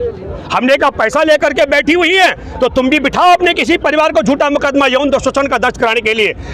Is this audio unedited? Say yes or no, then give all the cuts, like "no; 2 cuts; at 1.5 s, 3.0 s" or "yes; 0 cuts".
yes; 0 cuts